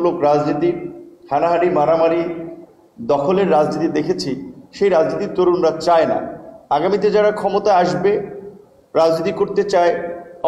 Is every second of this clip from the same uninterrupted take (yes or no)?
yes